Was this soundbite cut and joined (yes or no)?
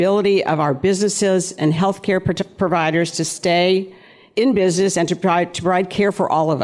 no